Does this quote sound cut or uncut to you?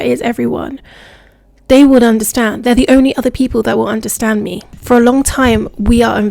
cut